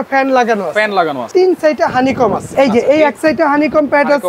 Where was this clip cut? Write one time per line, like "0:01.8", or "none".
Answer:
0:01.3
0:02.4